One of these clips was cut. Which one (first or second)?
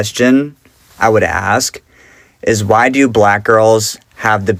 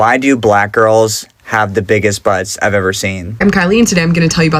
second